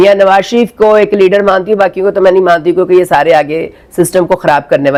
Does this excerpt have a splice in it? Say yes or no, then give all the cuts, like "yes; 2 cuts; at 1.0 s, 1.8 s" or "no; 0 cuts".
no; 0 cuts